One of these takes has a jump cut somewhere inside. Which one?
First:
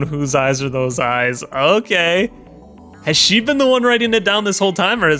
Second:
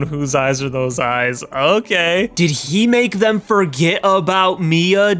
second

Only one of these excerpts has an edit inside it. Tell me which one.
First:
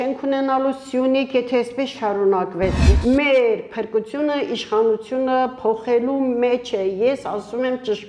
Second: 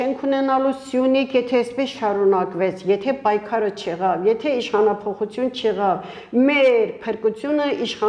first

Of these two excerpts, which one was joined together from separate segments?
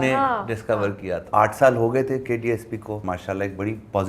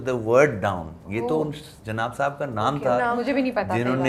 first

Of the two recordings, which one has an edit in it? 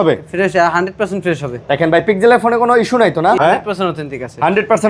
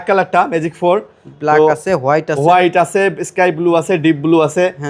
first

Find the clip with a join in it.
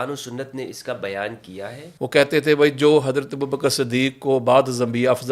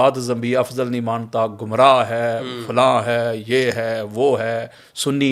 first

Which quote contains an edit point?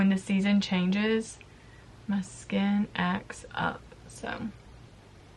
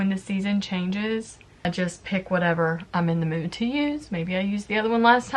second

